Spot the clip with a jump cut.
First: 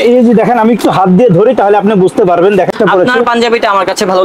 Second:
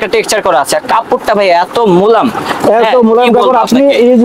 first; 1 cut; at 2.7 s

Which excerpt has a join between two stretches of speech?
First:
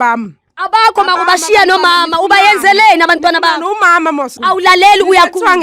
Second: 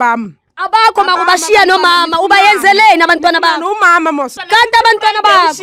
first; 1 cut; at 4.4 s

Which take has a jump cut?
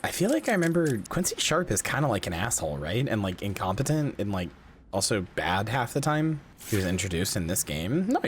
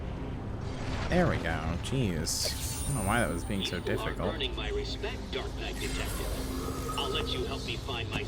first; 2 cuts; at 1.1 s, 6.5 s

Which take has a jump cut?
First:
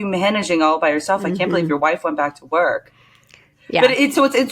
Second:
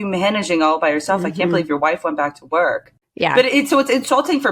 second; 1 cut; at 3.3 s

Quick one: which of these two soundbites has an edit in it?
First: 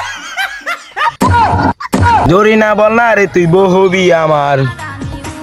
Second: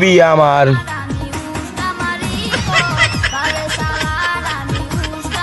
first; 1 cut; at 2.3 s

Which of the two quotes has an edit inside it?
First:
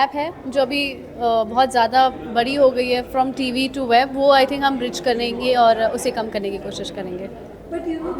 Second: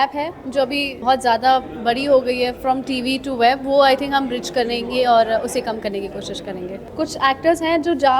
second; 2 cuts; at 1.0 s, 6.8 s

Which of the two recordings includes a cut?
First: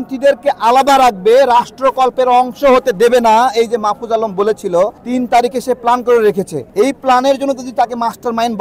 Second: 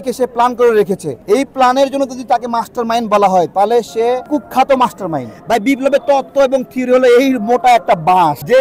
second; 1 cut; at 5.4 s

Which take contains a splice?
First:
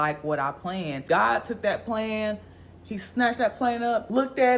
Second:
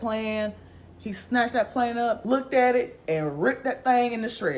first; 1 cut; at 0.9 s

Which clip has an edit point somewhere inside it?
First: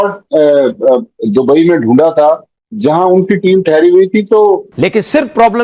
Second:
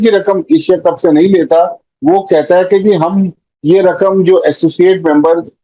first; 1 cut; at 4.7 s

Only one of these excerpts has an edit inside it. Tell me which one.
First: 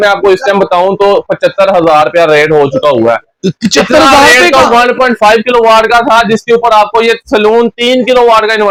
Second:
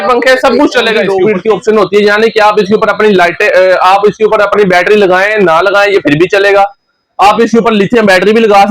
second; 1 cut; at 1.1 s

